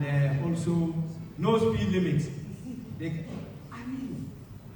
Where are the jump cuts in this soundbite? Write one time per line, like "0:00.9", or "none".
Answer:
none